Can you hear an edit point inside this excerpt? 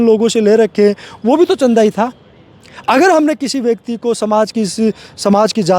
no; 0 cuts

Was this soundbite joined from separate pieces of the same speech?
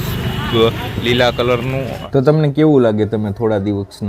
yes; 1 cut; at 2.0 s

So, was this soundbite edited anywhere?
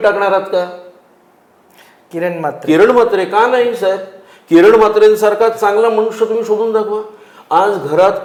no; 0 cuts

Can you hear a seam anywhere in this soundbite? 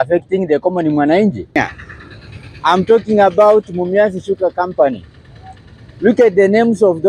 yes; 1 cut; at 1.6 s

